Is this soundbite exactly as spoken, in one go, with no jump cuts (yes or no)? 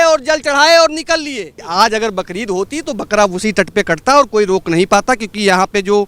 no